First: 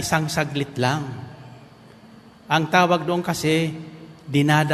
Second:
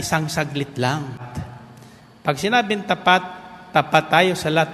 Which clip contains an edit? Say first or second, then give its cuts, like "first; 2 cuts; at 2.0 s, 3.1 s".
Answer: second; 1 cut; at 1.3 s